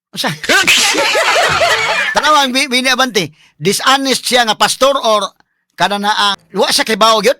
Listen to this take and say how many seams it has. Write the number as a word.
two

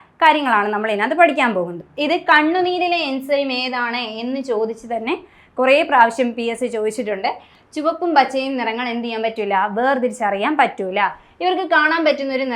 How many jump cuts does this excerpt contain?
two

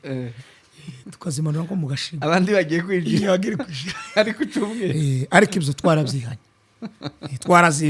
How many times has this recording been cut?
zero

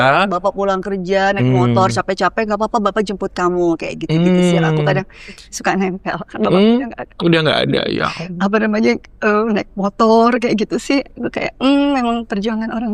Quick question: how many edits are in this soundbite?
zero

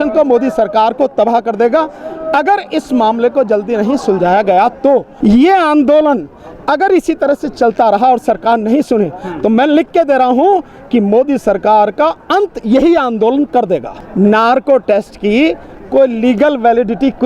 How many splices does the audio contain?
two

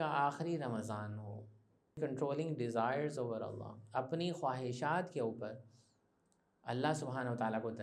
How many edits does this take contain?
one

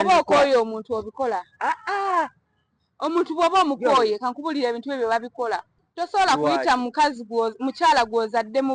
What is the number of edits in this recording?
one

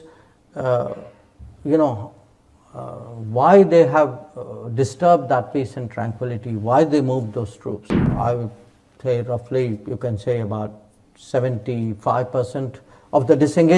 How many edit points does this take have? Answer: one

